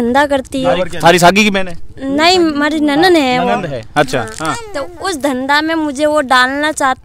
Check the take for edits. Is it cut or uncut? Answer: uncut